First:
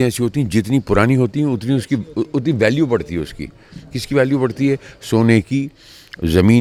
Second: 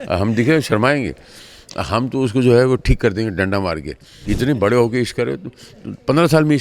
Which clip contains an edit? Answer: second; 1 cut; at 4.1 s

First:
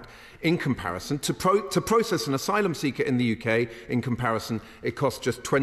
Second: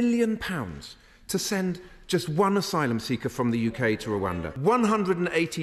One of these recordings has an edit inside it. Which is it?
second; 1 cut; at 4.5 s

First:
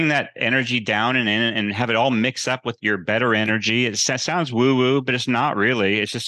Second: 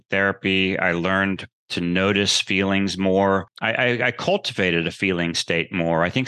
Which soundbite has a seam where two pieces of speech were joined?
second; 1 cut; at 3.5 s

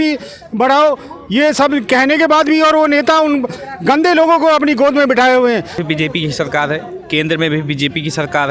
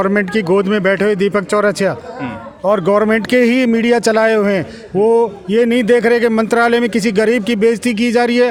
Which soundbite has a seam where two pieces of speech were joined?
first; 1 cut; at 5.8 s

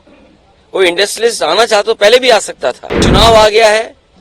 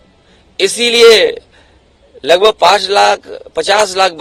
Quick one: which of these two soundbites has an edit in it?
first; 1 cut; at 3.0 s

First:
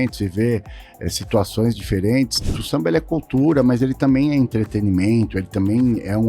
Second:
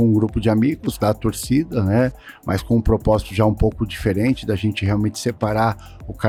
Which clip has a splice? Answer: first; 1 cut; at 2.6 s

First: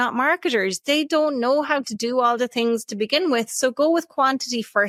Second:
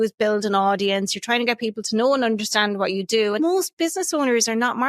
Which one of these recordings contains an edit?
second; 1 cut; at 3.4 s

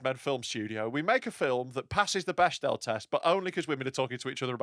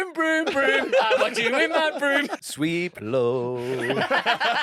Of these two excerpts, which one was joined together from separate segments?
second; 1 cut; at 2.4 s

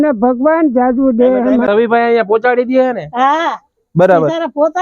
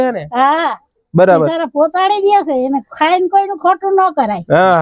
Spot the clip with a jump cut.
first; 1 cut; at 1.7 s

